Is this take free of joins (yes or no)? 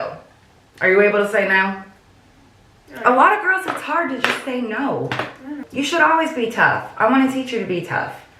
no